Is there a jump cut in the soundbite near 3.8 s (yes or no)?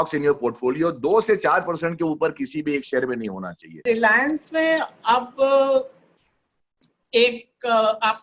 yes